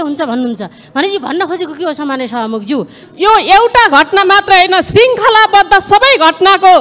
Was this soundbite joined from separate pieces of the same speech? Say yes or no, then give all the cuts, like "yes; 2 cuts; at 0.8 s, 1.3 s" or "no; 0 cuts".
yes; 1 cut; at 3.0 s